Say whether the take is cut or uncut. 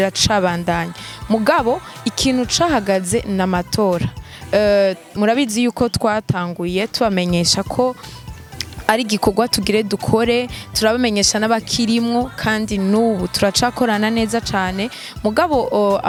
uncut